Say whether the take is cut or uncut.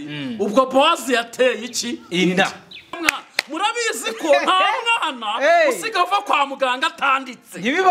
cut